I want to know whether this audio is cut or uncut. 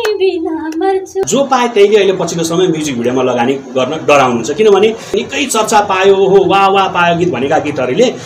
cut